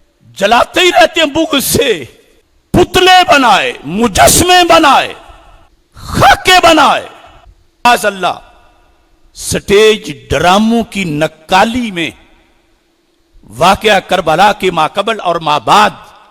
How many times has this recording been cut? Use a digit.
1